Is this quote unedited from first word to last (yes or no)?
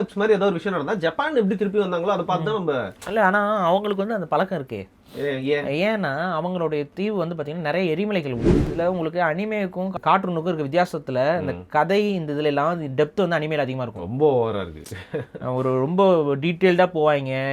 no